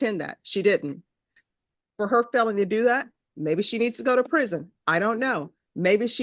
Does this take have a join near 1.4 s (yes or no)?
yes